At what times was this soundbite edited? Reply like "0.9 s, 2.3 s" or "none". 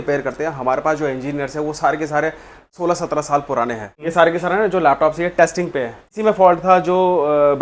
2.7 s, 3.9 s, 6.1 s